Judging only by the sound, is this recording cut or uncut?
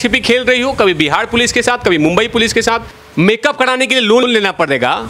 cut